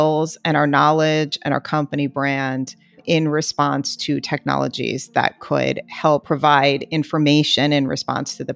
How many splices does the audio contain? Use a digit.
1